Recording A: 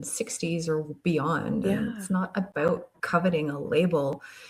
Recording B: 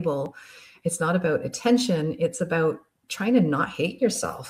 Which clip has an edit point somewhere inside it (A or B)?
A